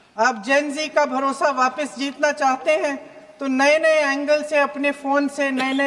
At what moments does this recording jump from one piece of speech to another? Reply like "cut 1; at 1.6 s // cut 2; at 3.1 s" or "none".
none